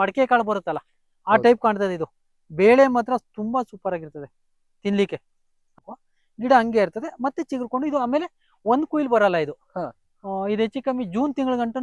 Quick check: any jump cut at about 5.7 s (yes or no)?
yes